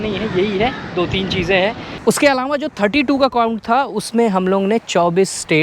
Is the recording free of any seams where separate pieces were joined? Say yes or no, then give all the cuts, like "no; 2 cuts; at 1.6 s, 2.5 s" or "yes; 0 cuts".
no; 1 cut; at 1.9 s